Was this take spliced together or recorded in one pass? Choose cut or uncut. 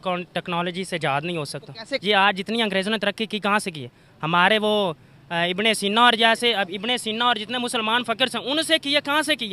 cut